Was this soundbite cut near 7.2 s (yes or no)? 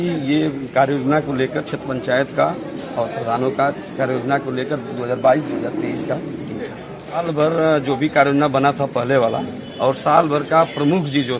yes